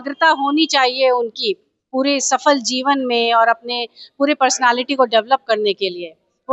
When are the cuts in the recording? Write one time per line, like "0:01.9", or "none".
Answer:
none